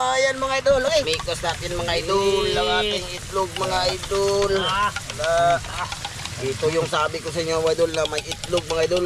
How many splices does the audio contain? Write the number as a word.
one